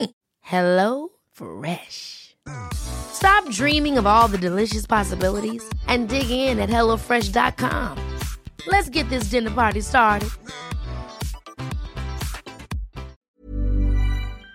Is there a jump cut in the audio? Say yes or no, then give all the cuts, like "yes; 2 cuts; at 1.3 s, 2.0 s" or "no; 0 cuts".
yes; 1 cut; at 13.2 s